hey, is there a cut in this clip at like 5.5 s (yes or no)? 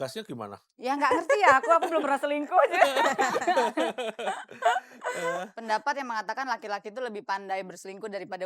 yes